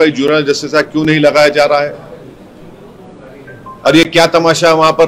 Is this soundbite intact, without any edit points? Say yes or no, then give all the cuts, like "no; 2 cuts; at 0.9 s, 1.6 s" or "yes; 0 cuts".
yes; 0 cuts